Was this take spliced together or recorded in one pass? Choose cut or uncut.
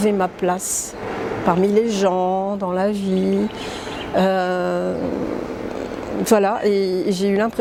uncut